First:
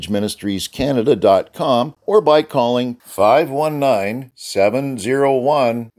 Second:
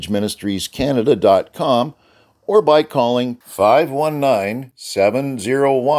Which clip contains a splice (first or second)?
first